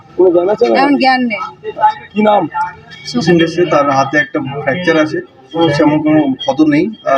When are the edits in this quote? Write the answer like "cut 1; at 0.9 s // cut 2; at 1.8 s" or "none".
cut 1; at 3.2 s // cut 2; at 5.6 s